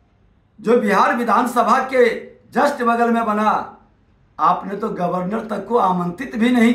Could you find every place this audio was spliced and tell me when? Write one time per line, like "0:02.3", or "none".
none